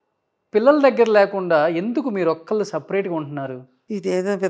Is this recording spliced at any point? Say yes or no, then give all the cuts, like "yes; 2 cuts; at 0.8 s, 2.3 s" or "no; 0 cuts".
no; 0 cuts